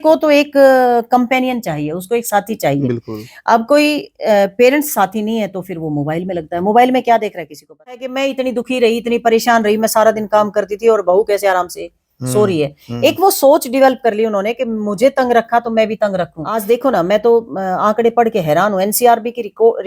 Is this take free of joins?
no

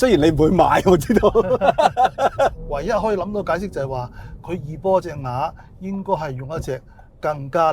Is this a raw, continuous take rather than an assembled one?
no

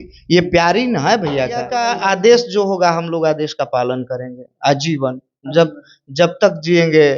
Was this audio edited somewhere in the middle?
yes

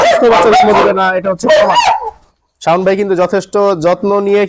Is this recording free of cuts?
no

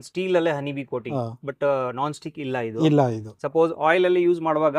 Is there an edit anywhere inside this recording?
yes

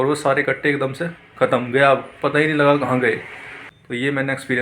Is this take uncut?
no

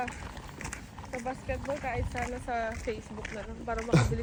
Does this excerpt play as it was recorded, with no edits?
yes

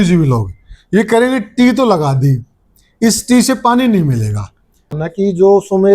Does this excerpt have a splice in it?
yes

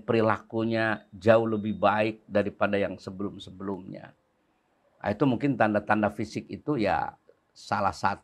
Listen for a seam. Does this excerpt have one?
no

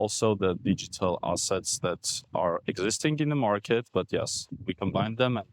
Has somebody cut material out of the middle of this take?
no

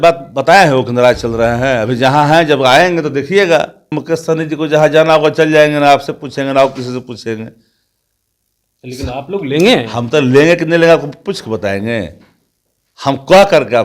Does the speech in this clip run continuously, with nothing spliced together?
no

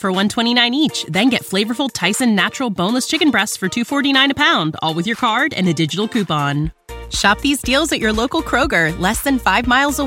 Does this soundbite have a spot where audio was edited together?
no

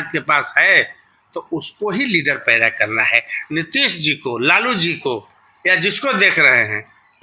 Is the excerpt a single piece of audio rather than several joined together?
yes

